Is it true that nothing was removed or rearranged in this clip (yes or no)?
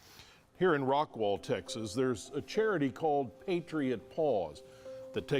yes